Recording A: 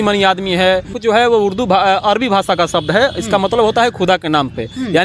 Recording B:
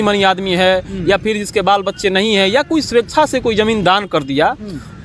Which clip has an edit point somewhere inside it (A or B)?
A